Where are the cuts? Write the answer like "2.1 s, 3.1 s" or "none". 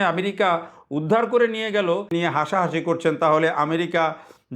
2.1 s